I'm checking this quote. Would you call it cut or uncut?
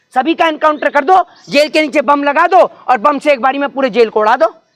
uncut